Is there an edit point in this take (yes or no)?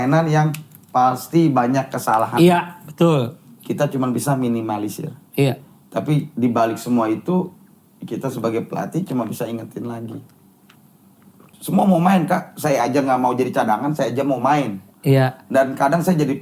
yes